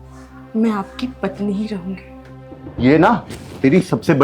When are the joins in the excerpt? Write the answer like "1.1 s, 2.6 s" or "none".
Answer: 2.6 s